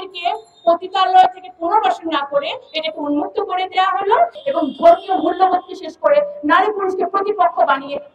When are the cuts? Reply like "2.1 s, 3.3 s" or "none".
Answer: 4.4 s